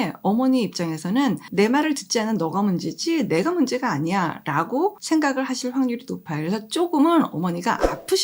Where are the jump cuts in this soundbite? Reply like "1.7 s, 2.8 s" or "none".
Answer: 1.4 s, 5.0 s